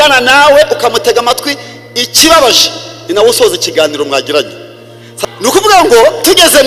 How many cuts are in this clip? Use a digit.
1